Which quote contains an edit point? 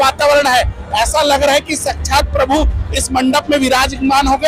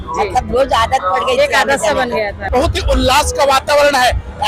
second; 1 cut; at 2.5 s

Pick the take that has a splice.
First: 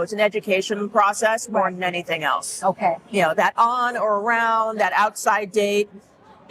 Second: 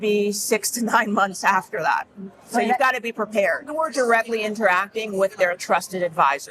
second; 1 cut; at 3.7 s

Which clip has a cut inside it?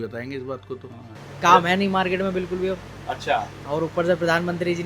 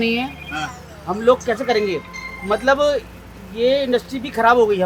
first; 1 cut; at 1.2 s

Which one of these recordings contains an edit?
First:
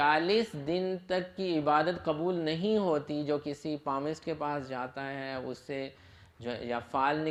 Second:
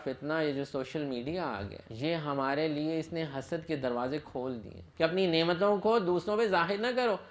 second; 2 cuts; at 1.8 s, 4.8 s

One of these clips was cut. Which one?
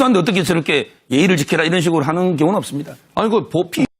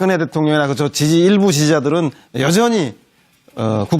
second; 1 cut; at 1.7 s

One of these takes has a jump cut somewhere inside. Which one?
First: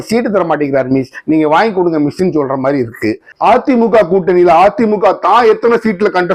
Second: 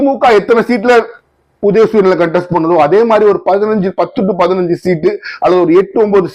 first; 1 cut; at 3.3 s

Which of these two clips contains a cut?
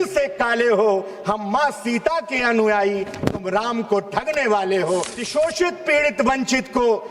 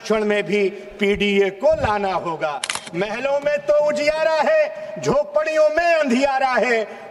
first; 1 cut; at 5.2 s

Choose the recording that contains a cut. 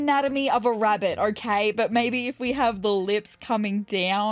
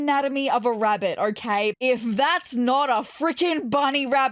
second; 1 cut; at 1.7 s

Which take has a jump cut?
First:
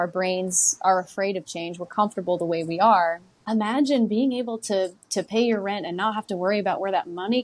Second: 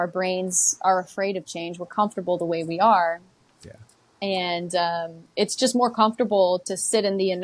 first; 1 cut; at 3.3 s

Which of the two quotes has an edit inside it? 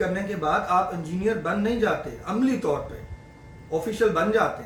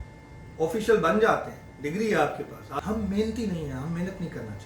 second; 1 cut; at 2.6 s

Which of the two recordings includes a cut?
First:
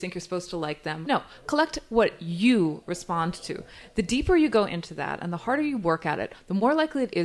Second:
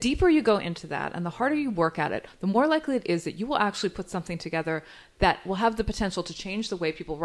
first; 1 cut; at 1.0 s

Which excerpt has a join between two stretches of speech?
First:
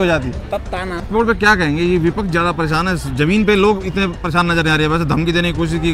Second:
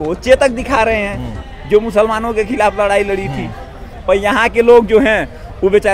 first; 1 cut; at 1.1 s

